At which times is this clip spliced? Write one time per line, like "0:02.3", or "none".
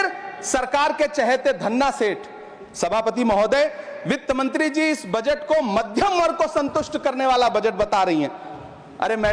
none